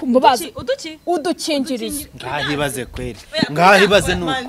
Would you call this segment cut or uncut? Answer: uncut